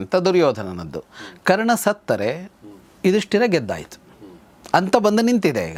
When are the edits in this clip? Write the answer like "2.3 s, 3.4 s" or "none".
none